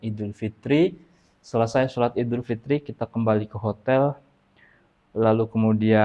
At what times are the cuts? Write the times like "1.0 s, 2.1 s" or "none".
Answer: none